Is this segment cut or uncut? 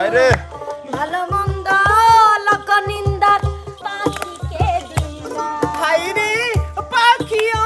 cut